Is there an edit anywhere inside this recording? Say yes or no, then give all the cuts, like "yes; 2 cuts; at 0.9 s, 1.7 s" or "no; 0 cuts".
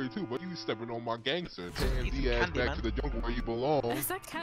yes; 1 cut; at 1.8 s